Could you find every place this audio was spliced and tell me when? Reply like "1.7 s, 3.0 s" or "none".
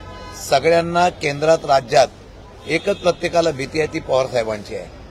none